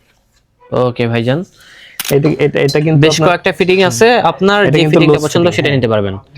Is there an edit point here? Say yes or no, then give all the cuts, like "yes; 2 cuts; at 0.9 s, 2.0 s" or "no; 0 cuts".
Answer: yes; 1 cut; at 2.0 s